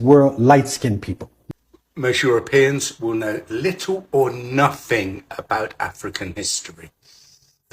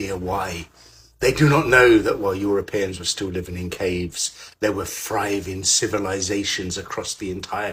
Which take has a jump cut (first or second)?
first